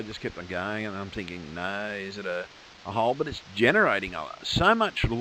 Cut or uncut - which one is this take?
cut